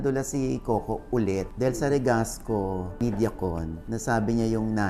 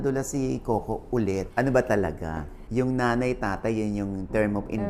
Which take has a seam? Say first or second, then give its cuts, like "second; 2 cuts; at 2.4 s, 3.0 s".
second; 1 cut; at 1.5 s